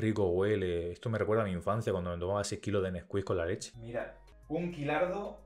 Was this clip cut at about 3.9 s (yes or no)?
yes